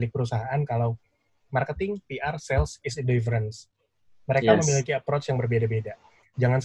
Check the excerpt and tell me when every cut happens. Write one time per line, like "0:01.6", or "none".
none